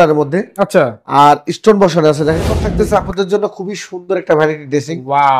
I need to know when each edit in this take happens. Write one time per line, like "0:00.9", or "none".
0:02.6